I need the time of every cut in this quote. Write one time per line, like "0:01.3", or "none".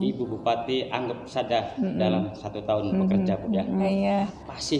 0:03.9